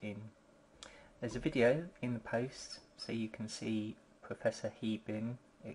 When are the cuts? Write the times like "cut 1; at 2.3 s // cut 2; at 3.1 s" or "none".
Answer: cut 1; at 1.0 s